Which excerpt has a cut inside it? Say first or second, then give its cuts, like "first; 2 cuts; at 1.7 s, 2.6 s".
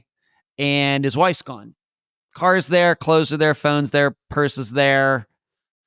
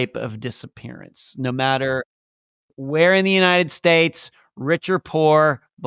second; 1 cut; at 2.7 s